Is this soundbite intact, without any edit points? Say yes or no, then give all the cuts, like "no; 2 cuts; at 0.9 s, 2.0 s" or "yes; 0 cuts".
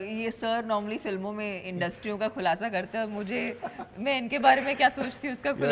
yes; 0 cuts